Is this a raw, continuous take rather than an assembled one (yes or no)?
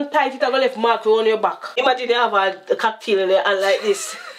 no